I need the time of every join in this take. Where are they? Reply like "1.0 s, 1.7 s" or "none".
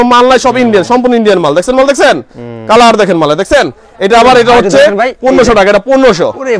none